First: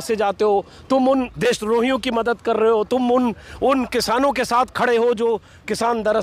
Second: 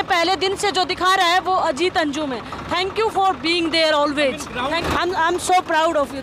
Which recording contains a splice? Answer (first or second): second